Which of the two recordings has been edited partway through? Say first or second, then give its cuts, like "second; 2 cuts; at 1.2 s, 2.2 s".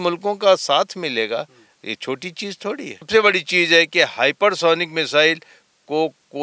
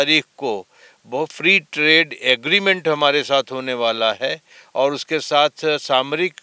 first; 1 cut; at 3.1 s